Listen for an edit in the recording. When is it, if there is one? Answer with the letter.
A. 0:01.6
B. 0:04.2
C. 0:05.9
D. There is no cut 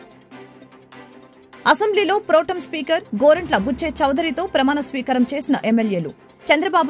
D